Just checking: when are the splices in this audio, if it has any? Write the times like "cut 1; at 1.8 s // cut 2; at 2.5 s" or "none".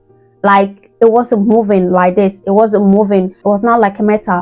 cut 1; at 3.4 s